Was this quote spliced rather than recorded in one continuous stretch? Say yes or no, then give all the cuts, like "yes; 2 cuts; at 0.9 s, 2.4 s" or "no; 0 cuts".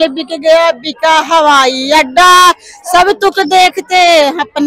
no; 0 cuts